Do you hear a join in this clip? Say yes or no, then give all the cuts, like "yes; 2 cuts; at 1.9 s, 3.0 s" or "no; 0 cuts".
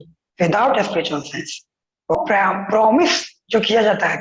yes; 1 cut; at 2.2 s